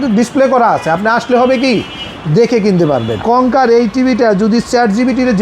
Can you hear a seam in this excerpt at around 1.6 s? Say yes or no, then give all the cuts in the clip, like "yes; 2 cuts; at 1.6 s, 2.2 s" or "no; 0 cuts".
no; 1 cut; at 3.2 s